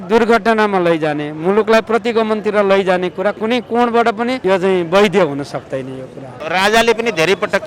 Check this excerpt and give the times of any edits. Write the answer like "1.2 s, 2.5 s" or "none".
4.4 s, 6.4 s